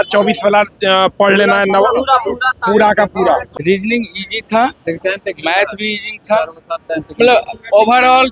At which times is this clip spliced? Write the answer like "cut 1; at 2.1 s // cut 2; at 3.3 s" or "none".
cut 1; at 3.5 s